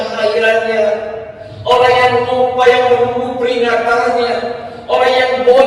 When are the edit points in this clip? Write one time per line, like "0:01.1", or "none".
none